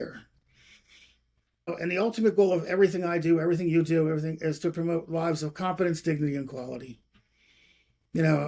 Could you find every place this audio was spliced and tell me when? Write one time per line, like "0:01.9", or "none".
0:01.7